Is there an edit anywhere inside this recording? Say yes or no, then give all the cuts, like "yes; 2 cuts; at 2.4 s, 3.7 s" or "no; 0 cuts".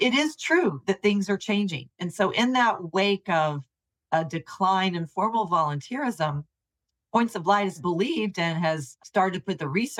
yes; 3 cuts; at 1.9 s, 7.8 s, 8.9 s